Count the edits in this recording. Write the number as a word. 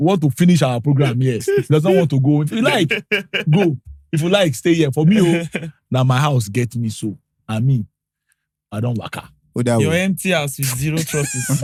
zero